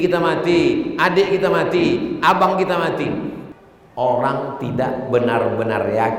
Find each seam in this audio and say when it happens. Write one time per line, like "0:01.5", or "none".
0:03.4

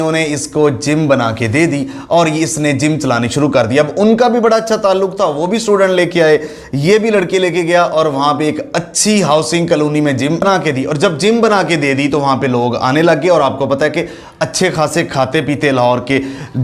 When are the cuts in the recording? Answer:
none

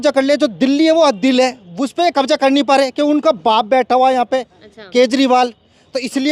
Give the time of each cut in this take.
none

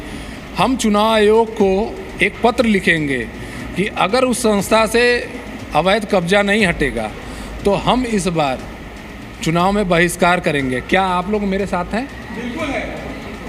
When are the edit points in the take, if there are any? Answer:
none

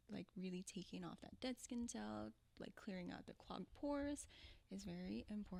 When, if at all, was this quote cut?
none

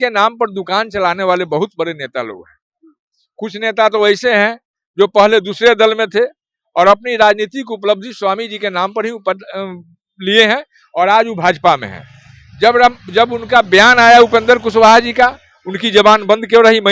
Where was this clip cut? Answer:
none

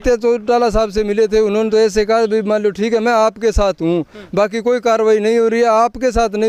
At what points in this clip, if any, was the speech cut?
none

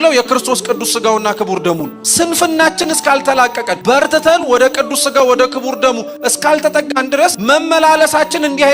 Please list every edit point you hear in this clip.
0:02.0
0:03.7
0:07.4

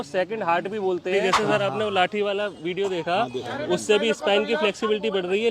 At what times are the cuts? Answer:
0:01.2

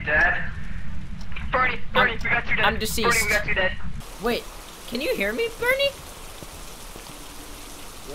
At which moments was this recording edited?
0:03.9

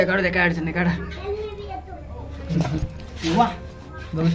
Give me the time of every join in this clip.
none

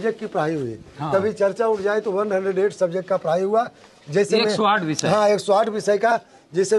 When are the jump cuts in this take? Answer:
none

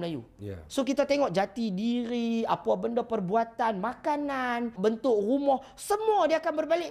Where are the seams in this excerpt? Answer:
0:04.7

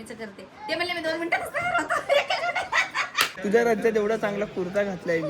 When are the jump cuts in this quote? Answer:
0:03.3

